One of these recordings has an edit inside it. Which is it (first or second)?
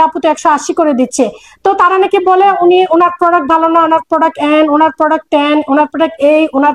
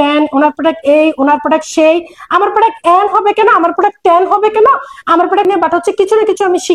second